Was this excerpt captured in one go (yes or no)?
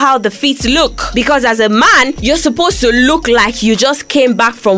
no